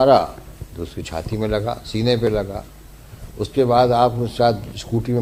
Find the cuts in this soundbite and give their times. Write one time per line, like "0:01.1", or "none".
none